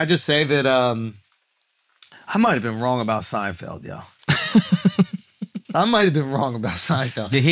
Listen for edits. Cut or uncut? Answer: uncut